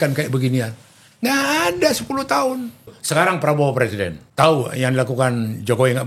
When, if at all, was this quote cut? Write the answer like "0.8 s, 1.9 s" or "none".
3.0 s, 4.2 s